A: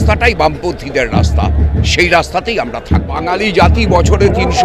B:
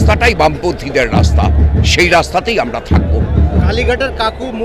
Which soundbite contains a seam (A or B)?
A